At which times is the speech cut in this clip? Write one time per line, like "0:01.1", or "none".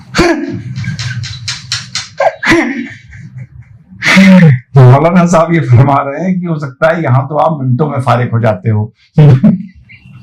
none